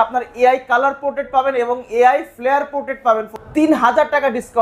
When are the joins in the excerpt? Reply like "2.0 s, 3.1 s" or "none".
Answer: 3.4 s